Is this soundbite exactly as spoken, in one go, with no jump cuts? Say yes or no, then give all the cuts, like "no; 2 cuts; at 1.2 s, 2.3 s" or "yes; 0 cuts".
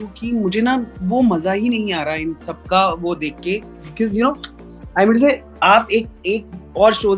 yes; 0 cuts